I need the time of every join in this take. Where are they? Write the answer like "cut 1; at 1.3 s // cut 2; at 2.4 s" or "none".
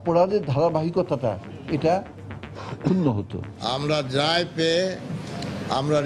cut 1; at 3.7 s